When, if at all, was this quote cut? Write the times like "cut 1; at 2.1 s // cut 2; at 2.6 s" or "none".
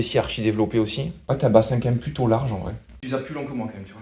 cut 1; at 1.1 s // cut 2; at 3.0 s